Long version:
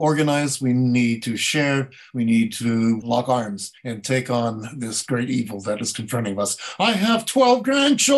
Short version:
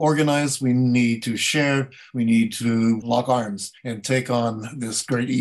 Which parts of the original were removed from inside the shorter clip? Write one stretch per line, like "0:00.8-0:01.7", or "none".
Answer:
none